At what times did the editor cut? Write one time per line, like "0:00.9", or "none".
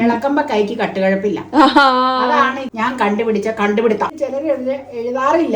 0:02.6
0:04.1